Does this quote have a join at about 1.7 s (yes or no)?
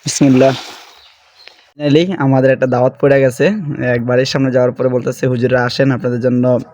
yes